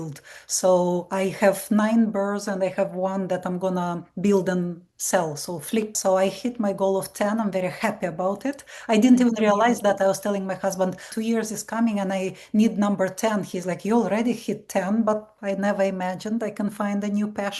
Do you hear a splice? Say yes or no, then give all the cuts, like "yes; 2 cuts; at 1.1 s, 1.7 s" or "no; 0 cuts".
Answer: yes; 3 cuts; at 5.9 s, 11.1 s, 15.3 s